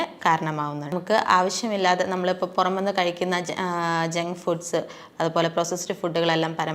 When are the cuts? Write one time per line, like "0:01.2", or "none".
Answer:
0:00.9

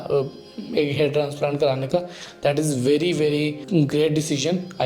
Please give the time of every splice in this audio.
0:03.6

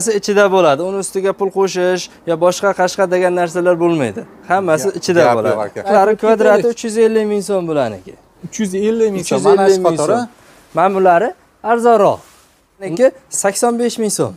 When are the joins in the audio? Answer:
0:05.9
0:12.9

